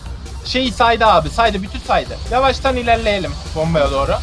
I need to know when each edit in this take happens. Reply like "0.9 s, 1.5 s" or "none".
2.2 s